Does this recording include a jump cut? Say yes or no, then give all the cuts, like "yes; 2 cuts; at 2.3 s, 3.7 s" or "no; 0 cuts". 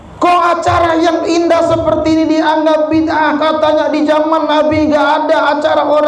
no; 0 cuts